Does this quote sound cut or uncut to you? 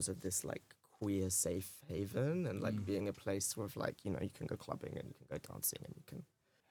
uncut